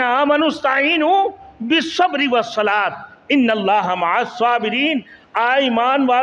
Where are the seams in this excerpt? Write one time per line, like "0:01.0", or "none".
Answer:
none